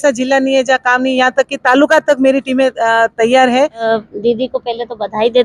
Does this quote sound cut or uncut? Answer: cut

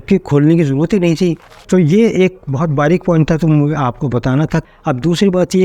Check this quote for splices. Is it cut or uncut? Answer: cut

